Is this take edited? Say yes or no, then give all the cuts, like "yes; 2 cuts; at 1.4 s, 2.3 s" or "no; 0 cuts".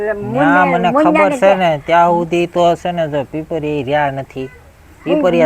no; 0 cuts